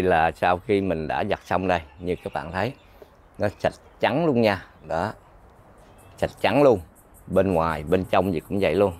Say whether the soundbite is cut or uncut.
uncut